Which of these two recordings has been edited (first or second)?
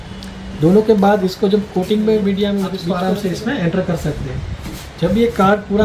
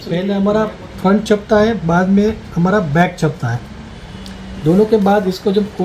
first